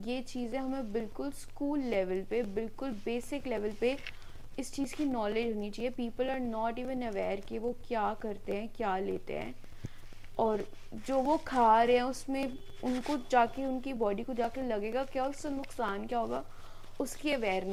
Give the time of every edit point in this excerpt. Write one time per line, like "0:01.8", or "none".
none